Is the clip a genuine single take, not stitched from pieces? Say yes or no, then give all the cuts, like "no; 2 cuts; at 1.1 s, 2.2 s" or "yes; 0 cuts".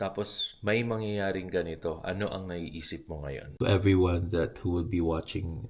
no; 1 cut; at 3.4 s